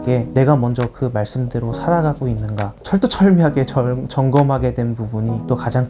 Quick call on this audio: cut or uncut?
uncut